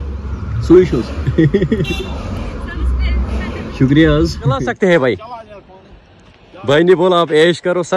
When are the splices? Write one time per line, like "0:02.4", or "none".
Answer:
0:04.6